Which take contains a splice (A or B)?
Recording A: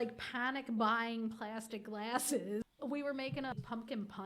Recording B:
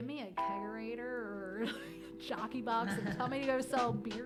A